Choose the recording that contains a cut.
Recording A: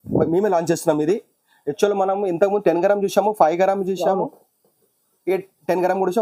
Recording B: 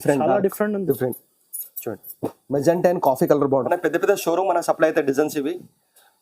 B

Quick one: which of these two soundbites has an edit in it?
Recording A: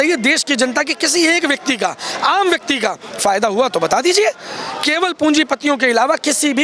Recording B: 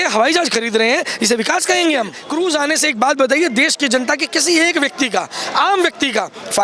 B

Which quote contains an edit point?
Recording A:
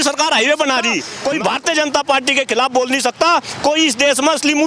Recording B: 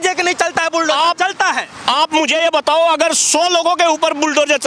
A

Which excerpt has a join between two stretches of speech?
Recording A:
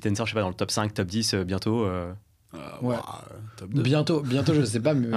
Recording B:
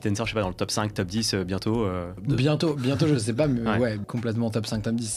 B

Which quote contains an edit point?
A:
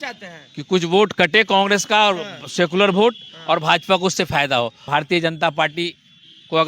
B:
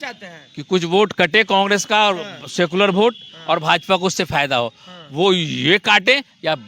A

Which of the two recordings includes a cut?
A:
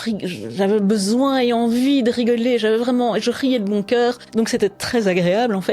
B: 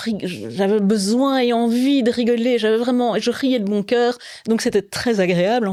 A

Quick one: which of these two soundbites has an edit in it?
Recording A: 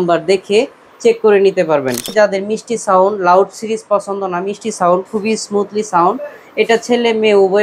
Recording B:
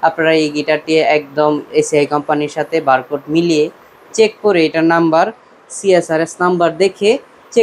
A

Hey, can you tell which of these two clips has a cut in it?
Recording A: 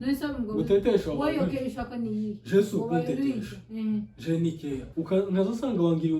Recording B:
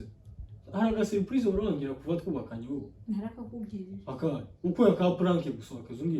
A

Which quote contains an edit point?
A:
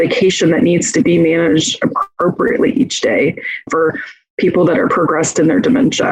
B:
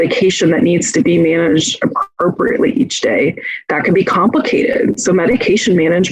A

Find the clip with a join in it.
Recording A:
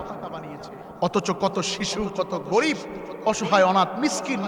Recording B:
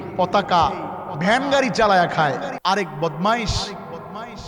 B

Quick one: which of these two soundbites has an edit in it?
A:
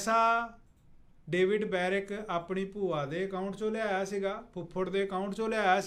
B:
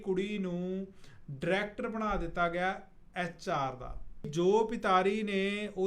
B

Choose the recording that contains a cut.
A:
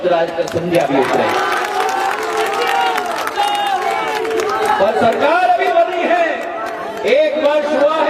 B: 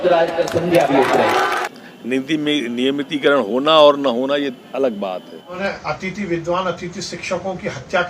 B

